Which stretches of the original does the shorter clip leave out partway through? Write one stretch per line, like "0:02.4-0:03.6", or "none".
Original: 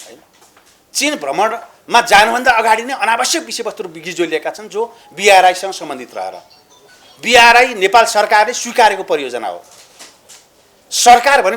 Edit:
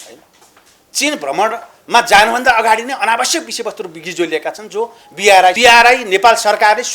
0:05.6-0:07.3